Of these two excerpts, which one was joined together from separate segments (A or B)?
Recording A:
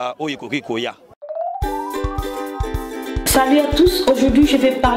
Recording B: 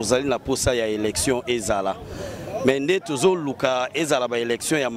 A